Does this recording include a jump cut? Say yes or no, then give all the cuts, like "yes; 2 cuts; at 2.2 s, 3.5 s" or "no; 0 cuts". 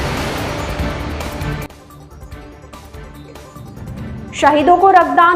yes; 1 cut; at 3.2 s